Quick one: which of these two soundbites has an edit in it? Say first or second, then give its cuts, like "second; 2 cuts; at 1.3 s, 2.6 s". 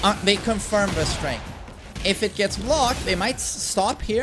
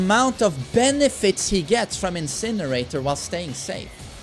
first; 1 cut; at 1.9 s